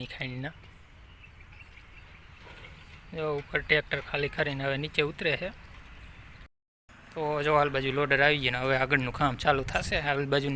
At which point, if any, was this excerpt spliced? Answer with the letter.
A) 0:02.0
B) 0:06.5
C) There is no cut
B